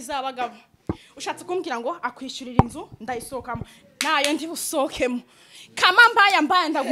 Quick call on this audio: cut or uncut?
uncut